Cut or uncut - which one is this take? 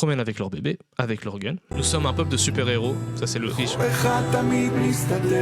cut